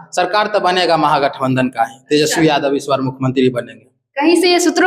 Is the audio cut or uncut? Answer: uncut